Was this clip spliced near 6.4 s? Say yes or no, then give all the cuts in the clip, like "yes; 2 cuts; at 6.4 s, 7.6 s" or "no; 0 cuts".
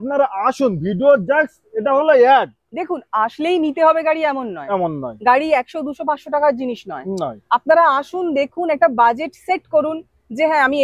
no; 0 cuts